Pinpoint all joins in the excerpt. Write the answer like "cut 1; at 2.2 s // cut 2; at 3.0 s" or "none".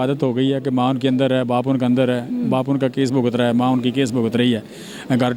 none